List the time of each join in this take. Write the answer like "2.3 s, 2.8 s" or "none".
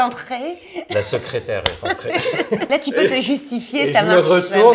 2.7 s